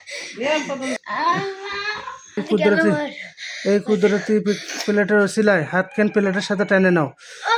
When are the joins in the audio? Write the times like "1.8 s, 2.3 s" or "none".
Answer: 1.0 s, 2.4 s

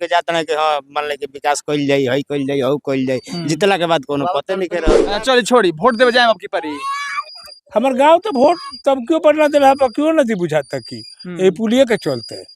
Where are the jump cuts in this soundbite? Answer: 5.2 s

